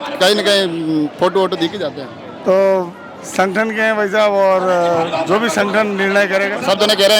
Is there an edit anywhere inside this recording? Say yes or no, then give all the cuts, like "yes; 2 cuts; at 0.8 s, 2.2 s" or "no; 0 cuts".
no; 0 cuts